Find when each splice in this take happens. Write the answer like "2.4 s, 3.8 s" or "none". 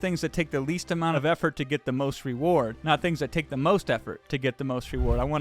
1.1 s